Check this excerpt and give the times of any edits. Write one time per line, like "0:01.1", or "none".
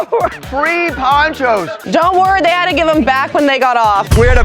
0:01.8